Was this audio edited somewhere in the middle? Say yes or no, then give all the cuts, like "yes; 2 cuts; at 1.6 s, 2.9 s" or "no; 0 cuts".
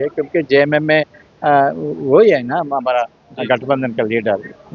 no; 0 cuts